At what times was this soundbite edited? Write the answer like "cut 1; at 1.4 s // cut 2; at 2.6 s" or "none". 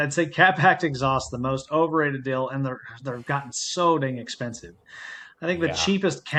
none